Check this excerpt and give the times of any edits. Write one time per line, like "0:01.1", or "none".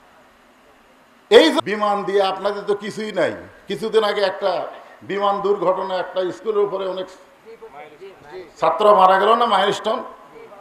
0:01.6